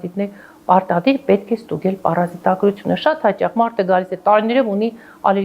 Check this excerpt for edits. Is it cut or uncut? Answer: uncut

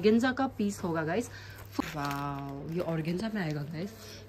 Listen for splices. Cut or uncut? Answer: cut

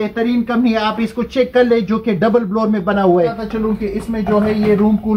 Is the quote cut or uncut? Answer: cut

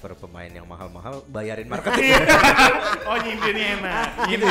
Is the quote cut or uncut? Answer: uncut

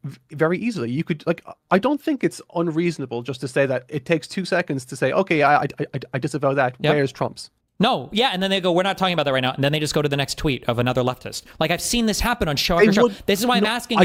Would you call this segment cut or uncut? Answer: uncut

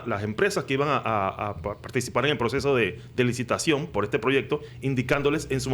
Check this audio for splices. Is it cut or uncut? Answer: uncut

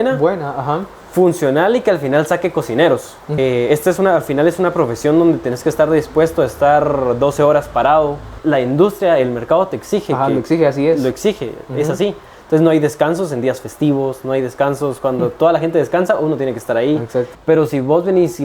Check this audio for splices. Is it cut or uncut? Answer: cut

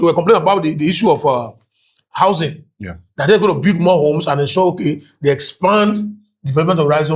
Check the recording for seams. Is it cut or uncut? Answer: uncut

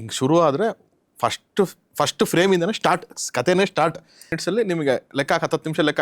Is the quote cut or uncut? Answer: cut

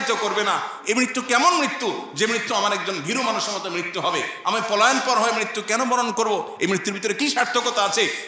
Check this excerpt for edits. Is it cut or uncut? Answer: uncut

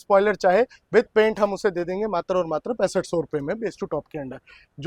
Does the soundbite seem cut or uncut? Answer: uncut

